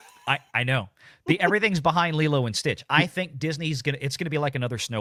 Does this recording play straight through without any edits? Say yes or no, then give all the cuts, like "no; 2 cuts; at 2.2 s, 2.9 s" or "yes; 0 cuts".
yes; 0 cuts